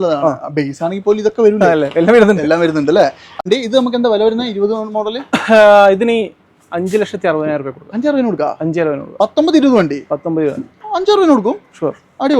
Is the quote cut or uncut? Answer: cut